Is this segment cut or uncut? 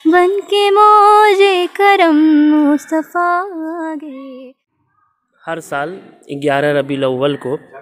cut